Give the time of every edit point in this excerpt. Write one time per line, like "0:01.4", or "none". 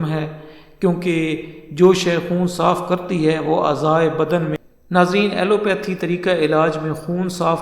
0:04.6